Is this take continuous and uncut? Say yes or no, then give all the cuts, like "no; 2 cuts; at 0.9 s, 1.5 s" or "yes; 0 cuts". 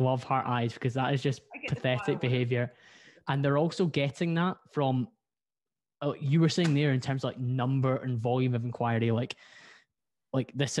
yes; 0 cuts